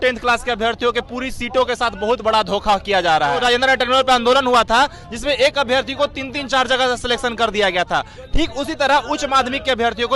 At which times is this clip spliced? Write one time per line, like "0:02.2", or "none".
0:03.4